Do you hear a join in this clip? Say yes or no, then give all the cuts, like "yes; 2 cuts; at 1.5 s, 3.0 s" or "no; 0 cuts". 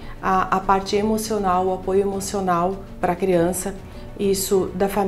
no; 0 cuts